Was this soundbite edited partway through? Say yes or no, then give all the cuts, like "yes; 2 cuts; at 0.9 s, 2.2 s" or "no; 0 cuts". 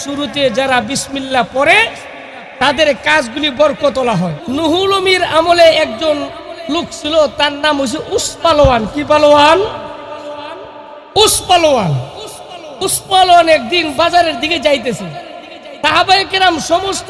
yes; 1 cut; at 4.4 s